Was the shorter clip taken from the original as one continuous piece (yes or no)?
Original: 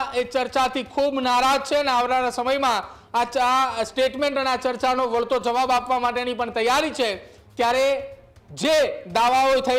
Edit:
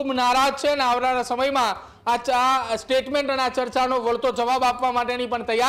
yes